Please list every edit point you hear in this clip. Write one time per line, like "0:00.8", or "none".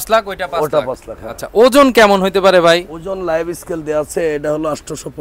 none